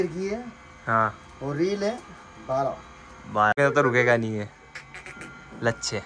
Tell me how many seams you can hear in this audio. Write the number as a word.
one